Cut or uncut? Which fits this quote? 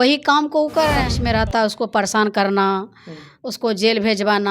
cut